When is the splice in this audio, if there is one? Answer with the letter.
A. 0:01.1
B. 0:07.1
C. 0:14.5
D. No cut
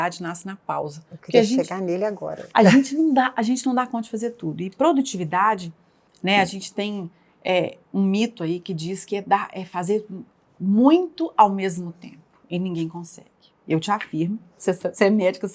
D